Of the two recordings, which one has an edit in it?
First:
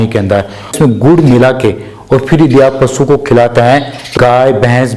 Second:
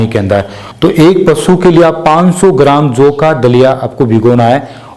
first; 2 cuts; at 0.8 s, 4.0 s

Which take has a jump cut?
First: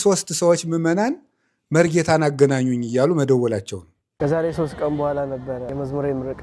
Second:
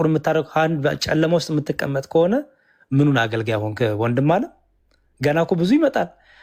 first; 1 cut; at 4.0 s

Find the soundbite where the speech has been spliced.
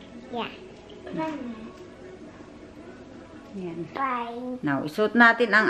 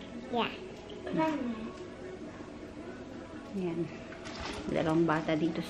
first; 1 cut; at 3.9 s

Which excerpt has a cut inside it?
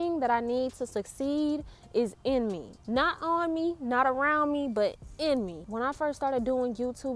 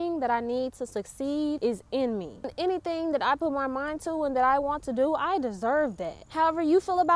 second; 3 cuts; at 1.6 s, 2.4 s, 6.2 s

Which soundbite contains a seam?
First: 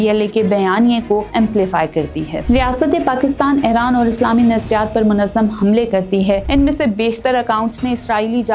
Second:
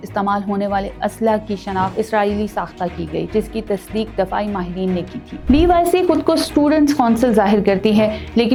first; 1 cut; at 6.4 s

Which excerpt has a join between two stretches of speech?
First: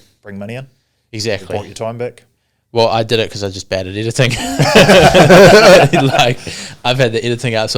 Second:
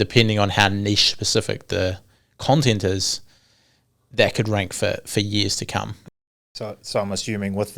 second; 1 cut; at 6.4 s

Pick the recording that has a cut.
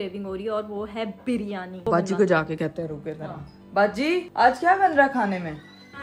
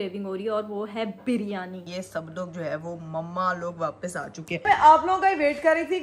second; 2 cuts; at 1.8 s, 4.7 s

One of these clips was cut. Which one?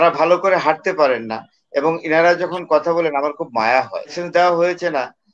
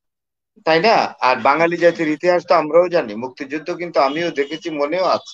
first; 1 cut; at 4.2 s

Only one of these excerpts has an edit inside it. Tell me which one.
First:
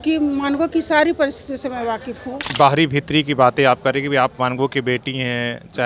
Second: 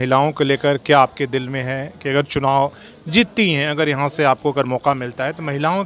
first; 1 cut; at 2.5 s

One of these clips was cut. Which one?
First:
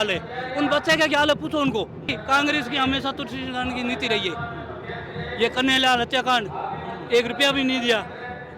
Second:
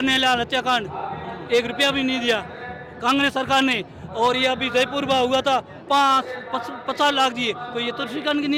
first; 1 cut; at 2.2 s

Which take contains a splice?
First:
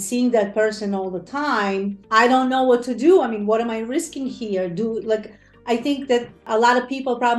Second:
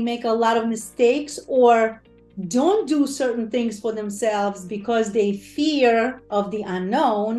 first; 1 cut; at 2.0 s

